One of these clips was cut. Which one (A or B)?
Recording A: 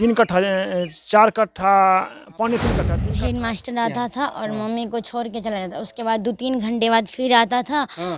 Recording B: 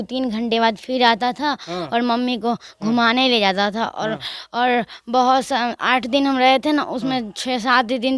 A